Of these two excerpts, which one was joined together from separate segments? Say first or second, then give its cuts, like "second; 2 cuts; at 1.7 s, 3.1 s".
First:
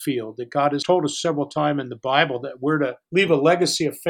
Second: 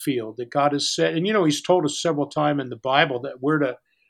first; 2 cuts; at 0.8 s, 3.0 s